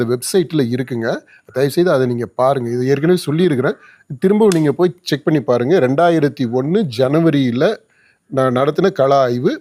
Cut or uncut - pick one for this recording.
uncut